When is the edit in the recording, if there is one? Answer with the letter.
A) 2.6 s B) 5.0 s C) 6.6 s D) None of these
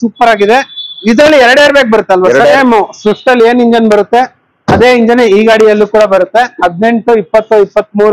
A